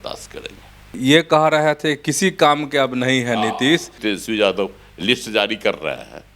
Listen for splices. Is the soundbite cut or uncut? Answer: cut